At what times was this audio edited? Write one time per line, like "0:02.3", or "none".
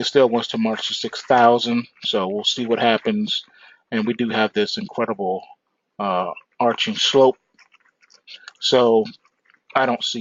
none